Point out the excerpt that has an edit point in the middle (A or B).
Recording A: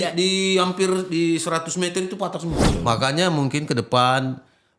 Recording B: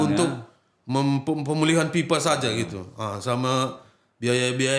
A